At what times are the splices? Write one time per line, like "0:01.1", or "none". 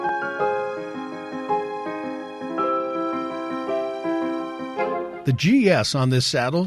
0:05.2